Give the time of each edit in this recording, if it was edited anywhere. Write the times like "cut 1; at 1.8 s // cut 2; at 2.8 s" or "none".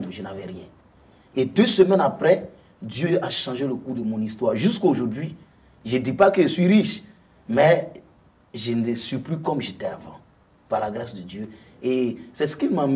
none